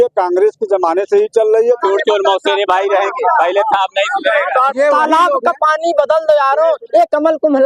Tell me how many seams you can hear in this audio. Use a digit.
2